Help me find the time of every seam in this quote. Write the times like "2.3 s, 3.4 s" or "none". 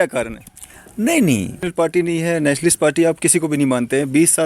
1.6 s